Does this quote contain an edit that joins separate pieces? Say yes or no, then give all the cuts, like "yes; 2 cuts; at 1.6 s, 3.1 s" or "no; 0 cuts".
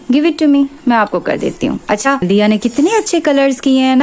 yes; 1 cut; at 2.2 s